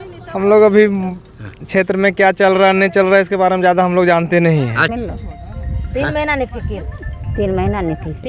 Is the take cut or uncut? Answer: cut